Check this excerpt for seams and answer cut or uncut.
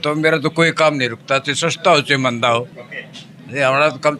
uncut